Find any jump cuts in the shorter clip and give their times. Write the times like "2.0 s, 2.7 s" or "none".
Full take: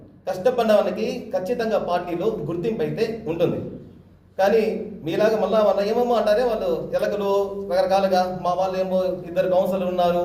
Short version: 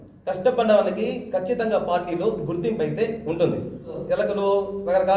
4.0 s